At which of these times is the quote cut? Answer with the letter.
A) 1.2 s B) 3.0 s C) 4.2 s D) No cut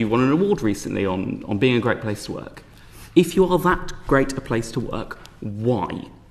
D